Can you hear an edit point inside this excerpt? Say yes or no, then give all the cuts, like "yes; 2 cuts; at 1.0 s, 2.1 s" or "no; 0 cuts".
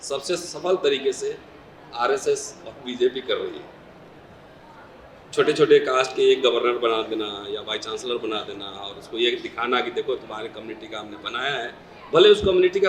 no; 0 cuts